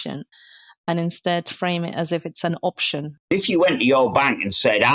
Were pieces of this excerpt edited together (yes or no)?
yes